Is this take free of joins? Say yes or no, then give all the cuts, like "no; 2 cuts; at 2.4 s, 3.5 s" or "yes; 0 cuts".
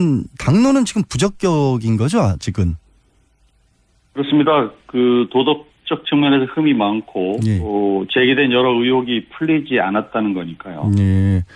yes; 0 cuts